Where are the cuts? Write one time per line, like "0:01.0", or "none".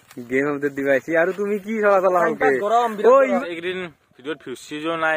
0:03.4